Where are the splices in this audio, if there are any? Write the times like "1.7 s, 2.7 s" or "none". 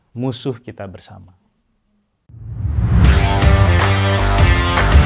none